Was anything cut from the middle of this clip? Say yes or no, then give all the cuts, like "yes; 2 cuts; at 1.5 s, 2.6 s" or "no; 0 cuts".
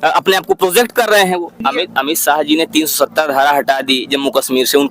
yes; 1 cut; at 1.6 s